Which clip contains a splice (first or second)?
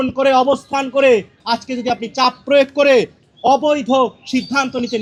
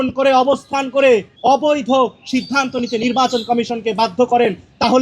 second